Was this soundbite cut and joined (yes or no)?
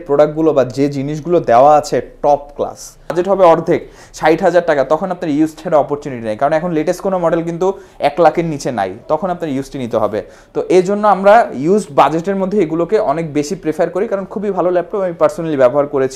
yes